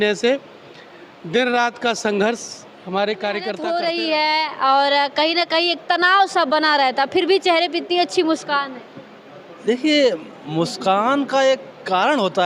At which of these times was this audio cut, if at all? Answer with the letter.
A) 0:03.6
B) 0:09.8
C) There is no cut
A